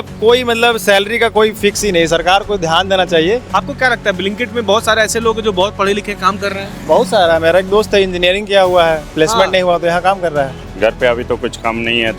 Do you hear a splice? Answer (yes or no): yes